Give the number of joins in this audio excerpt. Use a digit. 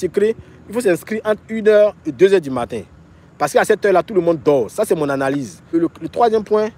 1